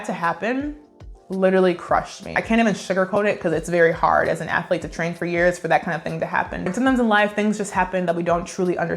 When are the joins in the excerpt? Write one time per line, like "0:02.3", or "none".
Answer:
0:02.3
0:06.6